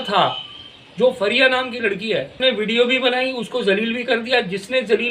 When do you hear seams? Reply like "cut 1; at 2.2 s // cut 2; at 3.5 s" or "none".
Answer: cut 1; at 2.4 s